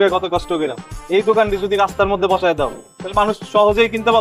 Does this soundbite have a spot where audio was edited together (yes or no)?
no